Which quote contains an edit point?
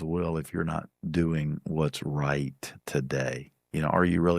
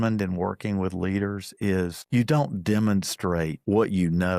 second; 2 cuts; at 2.0 s, 3.6 s

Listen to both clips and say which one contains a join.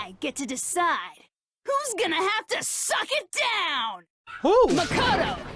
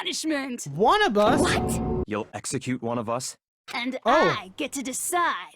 second; 1 cut; at 2.0 s

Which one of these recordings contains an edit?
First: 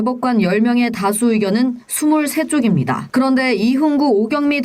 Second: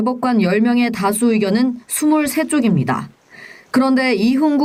first; 1 cut; at 3.0 s

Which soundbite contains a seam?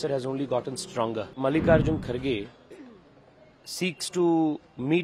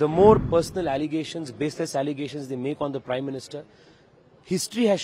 first; 1 cut; at 1.3 s

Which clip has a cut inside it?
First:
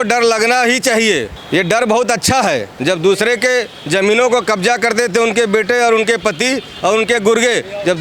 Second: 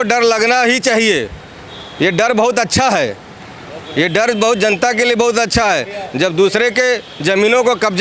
first; 2 cuts; at 1.3 s, 2.7 s

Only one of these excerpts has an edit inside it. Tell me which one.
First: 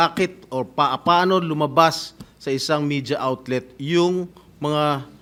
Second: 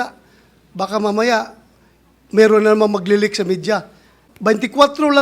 second; 1 cut; at 4.2 s

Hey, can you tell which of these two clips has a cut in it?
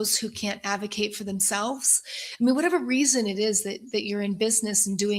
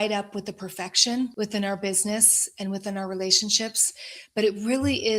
second; 1 cut; at 1.3 s

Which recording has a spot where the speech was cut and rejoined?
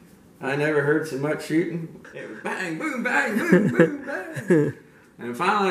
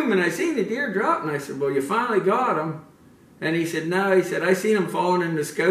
first; 1 cut; at 2.0 s

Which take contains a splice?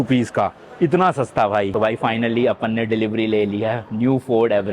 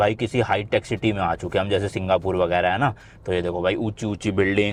first; 1 cut; at 1.7 s

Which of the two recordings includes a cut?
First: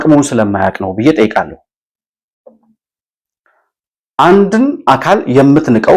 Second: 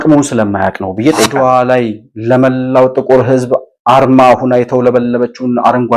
second; 1 cut; at 1.3 s

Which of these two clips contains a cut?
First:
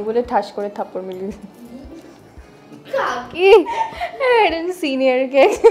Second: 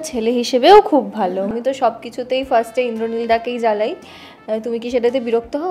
second; 1 cut; at 1.5 s

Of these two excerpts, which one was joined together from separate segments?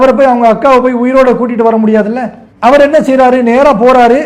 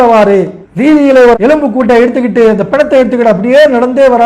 second; 1 cut; at 1.4 s

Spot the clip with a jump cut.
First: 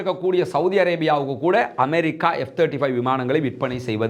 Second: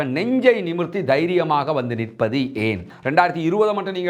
second; 1 cut; at 2.9 s

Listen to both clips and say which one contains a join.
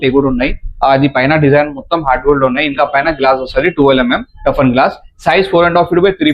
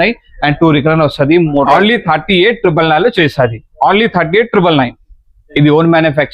second; 2 cuts; at 1.7 s, 5.4 s

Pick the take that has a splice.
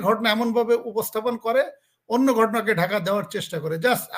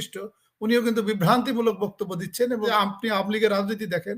second; 1 cut; at 2.7 s

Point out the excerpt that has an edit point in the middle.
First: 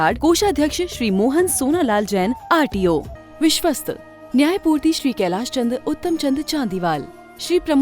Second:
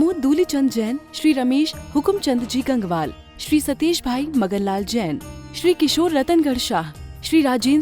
first; 1 cut; at 3.2 s

